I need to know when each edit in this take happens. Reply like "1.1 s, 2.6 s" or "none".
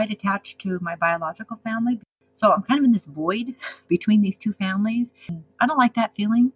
2.1 s, 5.4 s